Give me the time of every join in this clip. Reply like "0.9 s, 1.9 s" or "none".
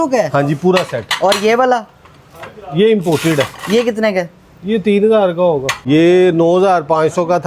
5.8 s